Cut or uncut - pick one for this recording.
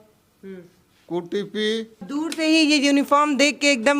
cut